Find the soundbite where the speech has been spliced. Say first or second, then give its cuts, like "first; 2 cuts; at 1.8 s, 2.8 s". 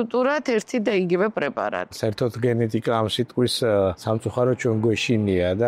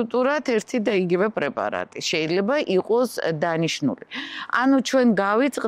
first; 2 cuts; at 2.0 s, 4.0 s